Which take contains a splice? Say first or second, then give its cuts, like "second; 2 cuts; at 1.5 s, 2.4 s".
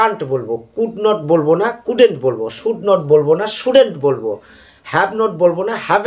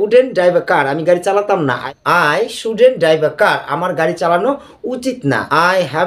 second; 1 cut; at 1.8 s